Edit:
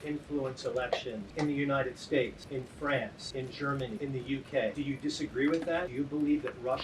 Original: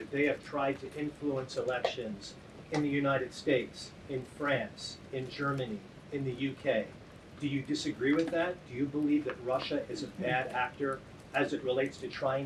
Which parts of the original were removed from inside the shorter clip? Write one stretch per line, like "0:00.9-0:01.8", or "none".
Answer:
0:02.2-0:02.6
0:03.8-0:04.0
0:05.1-0:05.7
0:06.9-0:07.4
0:08.5-0:08.7